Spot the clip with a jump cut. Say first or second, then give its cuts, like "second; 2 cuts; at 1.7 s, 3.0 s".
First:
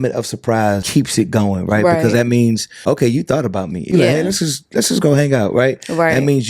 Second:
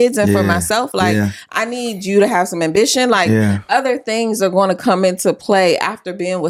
first; 3 cuts; at 0.8 s, 2.7 s, 3.9 s